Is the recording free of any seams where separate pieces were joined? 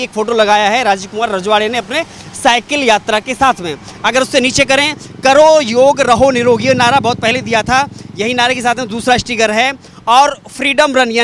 yes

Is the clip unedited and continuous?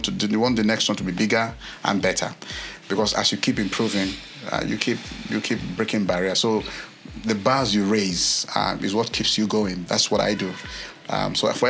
yes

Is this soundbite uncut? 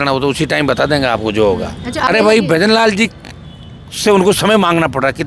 no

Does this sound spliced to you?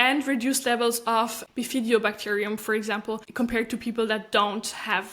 yes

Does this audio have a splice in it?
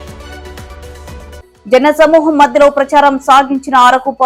yes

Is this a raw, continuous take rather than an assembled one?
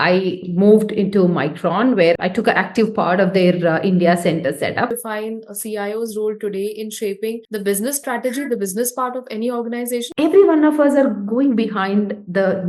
no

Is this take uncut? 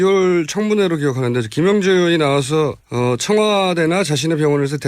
no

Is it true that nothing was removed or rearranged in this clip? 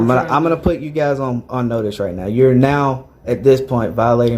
yes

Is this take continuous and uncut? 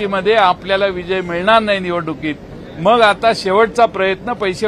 yes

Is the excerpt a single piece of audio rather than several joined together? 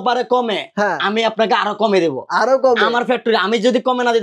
yes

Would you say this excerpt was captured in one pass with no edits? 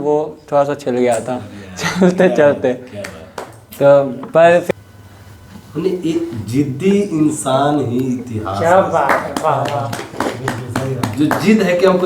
no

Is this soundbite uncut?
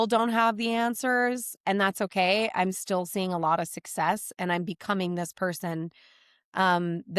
yes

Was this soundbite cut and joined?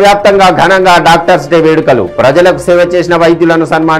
no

